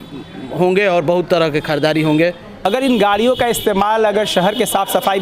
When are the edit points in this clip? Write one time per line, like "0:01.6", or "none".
0:02.5